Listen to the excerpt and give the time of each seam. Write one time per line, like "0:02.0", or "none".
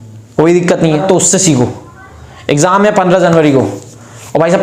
0:01.0